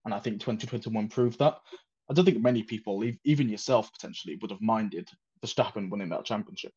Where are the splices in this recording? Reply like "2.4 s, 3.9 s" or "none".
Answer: none